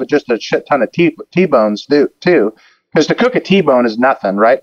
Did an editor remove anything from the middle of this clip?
no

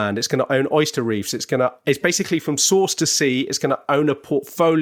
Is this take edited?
no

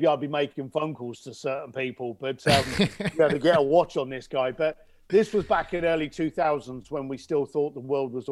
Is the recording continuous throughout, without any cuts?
yes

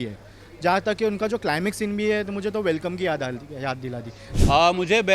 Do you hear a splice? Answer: yes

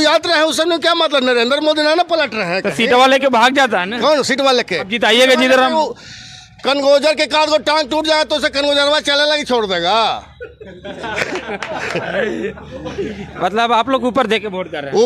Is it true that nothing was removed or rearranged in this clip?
yes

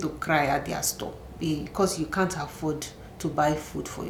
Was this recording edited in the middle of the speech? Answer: no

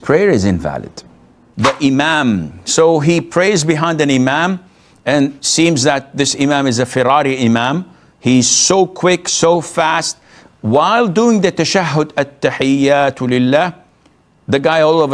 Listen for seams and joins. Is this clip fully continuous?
no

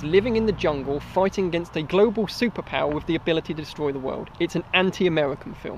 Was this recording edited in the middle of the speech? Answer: no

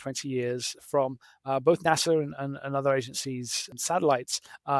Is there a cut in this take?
yes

